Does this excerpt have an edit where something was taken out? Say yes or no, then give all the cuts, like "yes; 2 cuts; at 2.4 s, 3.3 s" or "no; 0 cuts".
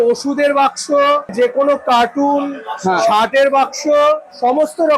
yes; 1 cut; at 1.3 s